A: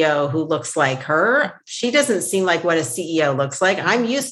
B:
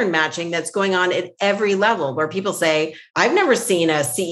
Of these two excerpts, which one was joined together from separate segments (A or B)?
B